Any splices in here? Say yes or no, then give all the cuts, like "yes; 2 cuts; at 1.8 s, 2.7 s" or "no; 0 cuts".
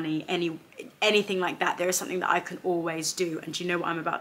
no; 0 cuts